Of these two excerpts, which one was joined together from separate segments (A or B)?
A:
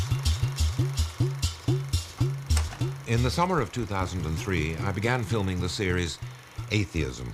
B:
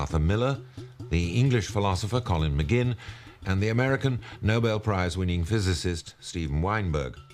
B